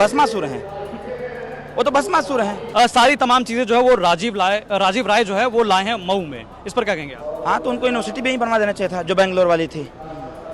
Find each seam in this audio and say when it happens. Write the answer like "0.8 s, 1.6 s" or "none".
2.6 s